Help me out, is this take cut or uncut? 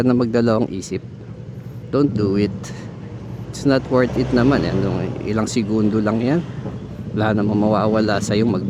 uncut